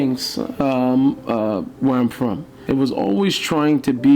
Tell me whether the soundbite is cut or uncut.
cut